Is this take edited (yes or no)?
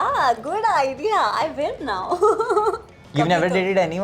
yes